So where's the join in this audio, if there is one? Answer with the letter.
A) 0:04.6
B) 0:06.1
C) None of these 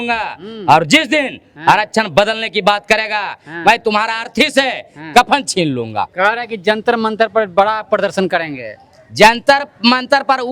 B